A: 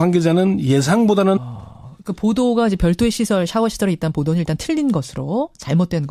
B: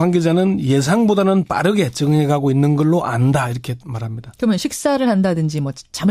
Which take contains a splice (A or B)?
B